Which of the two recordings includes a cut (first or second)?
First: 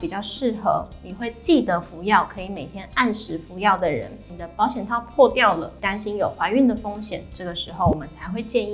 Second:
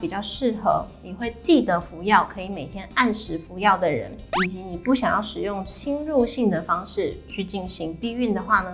first